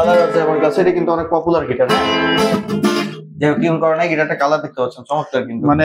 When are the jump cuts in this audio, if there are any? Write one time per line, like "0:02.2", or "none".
none